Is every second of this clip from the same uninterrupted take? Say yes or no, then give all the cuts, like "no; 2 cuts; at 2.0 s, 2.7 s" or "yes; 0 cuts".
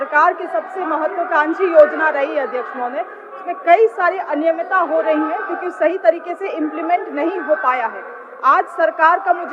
yes; 0 cuts